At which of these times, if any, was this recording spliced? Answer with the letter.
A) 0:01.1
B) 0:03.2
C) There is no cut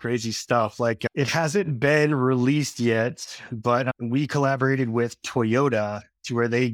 A